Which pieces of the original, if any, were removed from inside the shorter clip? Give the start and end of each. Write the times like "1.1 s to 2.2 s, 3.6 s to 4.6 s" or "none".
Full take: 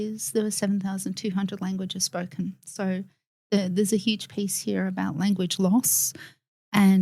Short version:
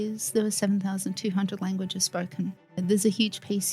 2.8 s to 3.6 s